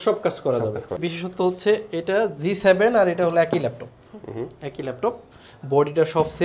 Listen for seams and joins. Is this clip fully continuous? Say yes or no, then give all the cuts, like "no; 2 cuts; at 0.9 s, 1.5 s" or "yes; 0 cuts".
no; 1 cut; at 1.0 s